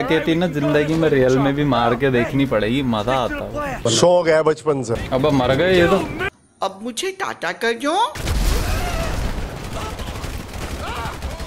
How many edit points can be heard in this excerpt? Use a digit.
2